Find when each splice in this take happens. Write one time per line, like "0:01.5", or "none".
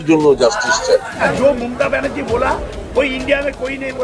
0:01.2